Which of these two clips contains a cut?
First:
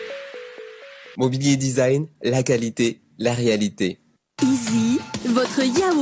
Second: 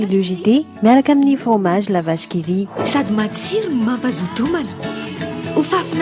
first; 1 cut; at 4.1 s

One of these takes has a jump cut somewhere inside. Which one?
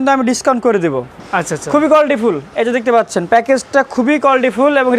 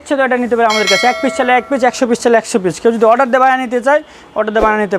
first; 1 cut; at 1.1 s

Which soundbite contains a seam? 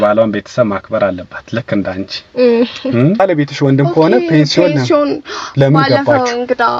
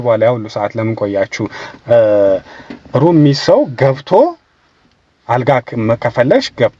first; 1 cut; at 3.2 s

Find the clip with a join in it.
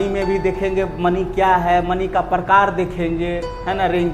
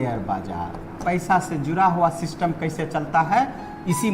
second; 1 cut; at 1.0 s

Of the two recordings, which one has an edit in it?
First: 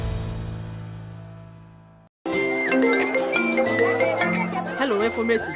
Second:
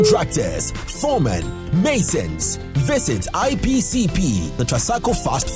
first; 1 cut; at 1.9 s

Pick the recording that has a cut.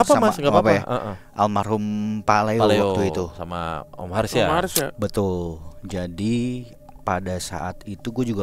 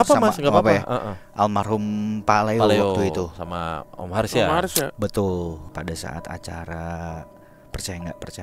second; 1 cut; at 5.7 s

